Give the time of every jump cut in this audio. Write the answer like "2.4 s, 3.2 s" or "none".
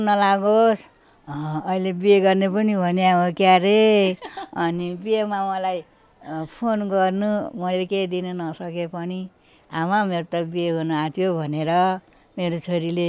none